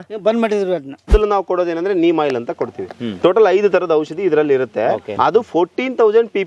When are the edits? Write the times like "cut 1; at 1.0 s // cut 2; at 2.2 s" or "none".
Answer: cut 1; at 1.1 s // cut 2; at 5.1 s